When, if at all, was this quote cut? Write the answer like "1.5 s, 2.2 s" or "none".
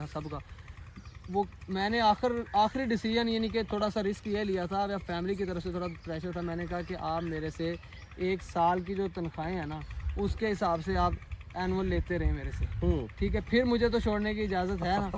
none